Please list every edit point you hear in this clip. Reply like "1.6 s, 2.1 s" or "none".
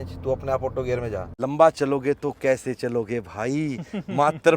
1.3 s